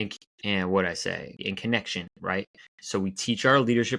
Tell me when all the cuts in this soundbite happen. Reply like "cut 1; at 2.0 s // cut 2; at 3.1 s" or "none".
cut 1; at 1.4 s